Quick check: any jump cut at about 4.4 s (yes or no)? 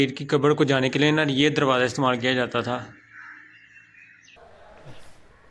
yes